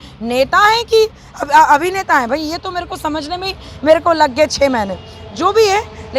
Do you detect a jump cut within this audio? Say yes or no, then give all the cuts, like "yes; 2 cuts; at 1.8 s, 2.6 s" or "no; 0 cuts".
no; 0 cuts